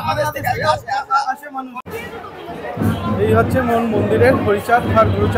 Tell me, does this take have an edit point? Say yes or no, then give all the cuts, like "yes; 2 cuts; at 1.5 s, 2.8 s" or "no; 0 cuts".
yes; 1 cut; at 1.8 s